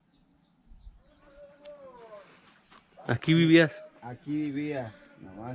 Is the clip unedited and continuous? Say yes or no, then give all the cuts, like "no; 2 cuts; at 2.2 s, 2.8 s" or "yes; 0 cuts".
no; 1 cut; at 1.3 s